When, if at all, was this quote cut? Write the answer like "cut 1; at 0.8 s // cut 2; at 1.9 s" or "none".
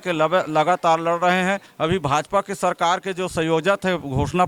cut 1; at 1.7 s